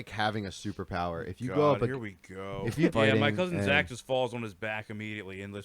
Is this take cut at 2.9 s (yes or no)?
yes